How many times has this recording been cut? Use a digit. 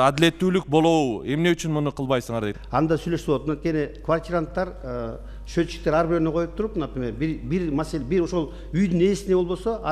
1